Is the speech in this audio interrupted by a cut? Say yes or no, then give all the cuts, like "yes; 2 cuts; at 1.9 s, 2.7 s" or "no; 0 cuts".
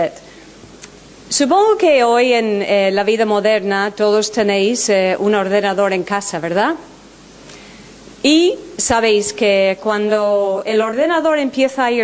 yes; 1 cut; at 8.6 s